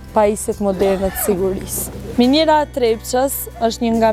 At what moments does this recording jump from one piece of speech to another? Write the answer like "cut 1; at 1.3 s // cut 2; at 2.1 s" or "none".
none